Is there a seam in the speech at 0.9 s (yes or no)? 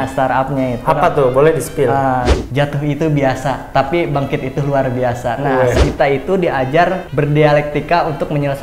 no